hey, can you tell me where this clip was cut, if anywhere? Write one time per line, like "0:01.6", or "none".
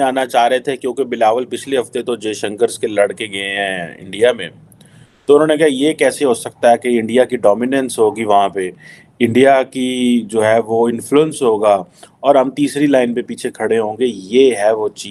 none